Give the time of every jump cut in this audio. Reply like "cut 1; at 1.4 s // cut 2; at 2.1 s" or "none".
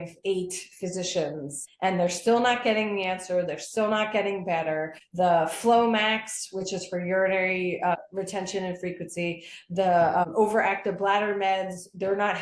cut 1; at 1.6 s // cut 2; at 5.0 s // cut 3; at 7.9 s // cut 4; at 10.2 s